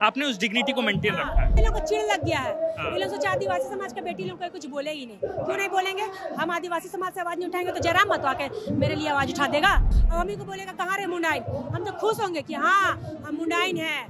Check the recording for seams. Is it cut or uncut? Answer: cut